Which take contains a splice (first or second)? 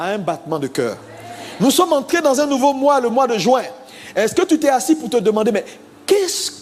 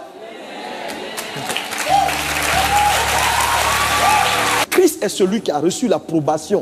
second